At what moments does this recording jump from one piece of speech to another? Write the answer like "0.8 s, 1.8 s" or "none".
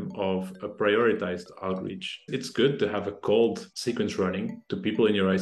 2.3 s, 3.7 s